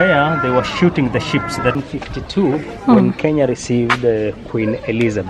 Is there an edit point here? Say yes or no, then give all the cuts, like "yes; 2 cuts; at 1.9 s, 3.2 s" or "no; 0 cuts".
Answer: yes; 1 cut; at 1.8 s